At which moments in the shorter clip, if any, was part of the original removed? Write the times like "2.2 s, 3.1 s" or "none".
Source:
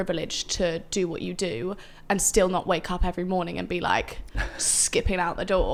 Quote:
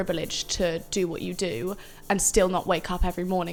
none